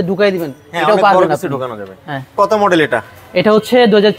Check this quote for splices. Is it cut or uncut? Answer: uncut